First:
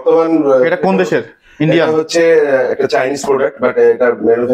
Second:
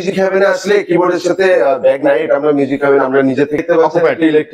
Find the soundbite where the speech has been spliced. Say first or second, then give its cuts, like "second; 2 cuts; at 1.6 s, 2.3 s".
second; 1 cut; at 3.6 s